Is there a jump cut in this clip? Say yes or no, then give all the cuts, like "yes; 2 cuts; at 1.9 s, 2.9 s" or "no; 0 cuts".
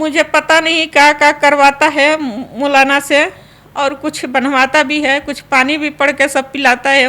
no; 0 cuts